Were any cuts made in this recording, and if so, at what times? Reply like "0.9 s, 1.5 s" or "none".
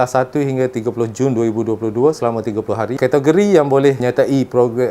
3.0 s, 4.0 s